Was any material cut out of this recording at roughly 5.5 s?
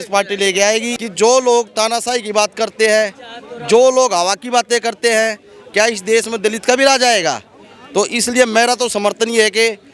no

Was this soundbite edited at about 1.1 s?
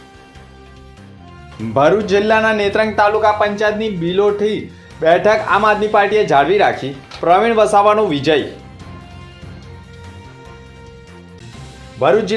yes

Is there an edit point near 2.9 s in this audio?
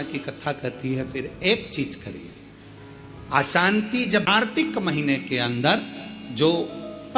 no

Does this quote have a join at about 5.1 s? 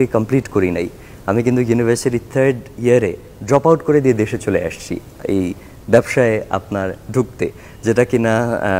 no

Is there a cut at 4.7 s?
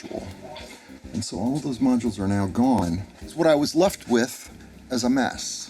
no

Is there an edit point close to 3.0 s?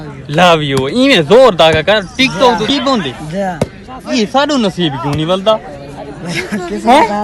yes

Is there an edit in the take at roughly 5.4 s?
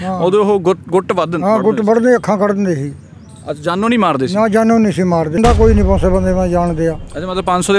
yes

